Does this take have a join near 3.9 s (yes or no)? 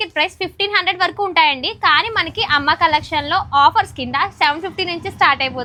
no